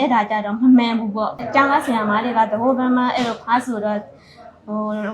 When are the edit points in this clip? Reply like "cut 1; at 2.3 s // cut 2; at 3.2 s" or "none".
cut 1; at 1.4 s